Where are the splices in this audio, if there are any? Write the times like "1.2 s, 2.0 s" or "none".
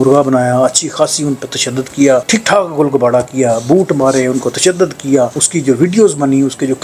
none